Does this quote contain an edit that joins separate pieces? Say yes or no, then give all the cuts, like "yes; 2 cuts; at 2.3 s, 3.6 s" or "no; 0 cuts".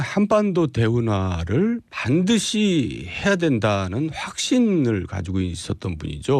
no; 0 cuts